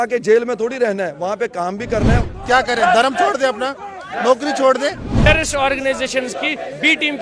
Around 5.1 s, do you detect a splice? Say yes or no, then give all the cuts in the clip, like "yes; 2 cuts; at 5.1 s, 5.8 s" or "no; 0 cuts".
yes; 2 cuts; at 2.3 s, 5.1 s